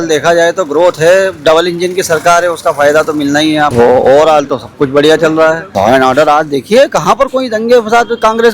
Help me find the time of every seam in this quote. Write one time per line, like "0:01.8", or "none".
0:03.7
0:05.7